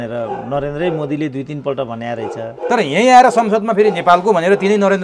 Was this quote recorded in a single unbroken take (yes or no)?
yes